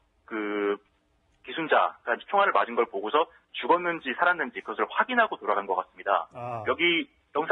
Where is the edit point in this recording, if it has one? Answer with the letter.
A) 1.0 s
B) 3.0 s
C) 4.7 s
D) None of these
D